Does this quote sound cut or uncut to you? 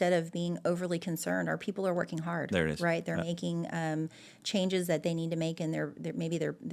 uncut